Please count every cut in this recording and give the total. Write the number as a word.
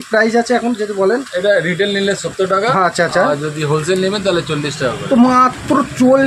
zero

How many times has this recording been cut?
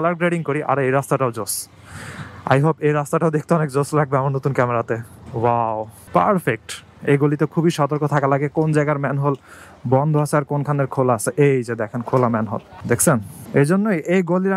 one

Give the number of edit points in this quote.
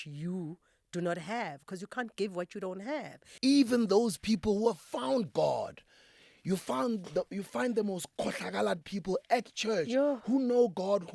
one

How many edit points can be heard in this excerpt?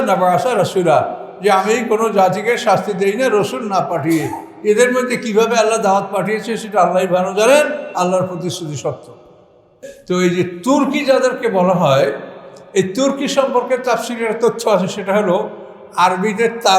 one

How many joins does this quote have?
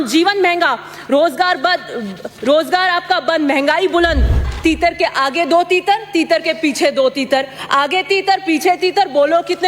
one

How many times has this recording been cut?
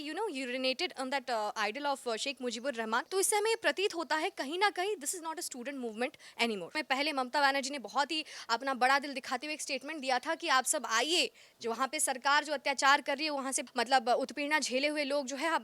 three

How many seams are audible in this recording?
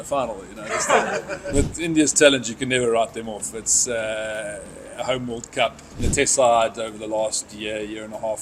two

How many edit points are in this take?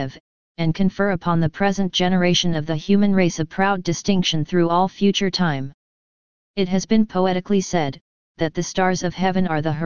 one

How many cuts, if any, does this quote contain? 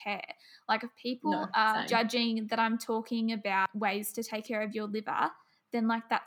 two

